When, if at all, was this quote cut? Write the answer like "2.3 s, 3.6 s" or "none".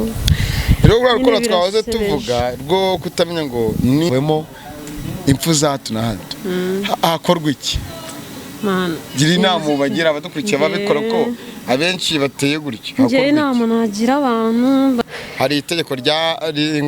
4.1 s, 15.0 s